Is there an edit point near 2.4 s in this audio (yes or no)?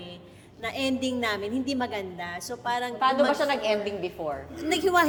no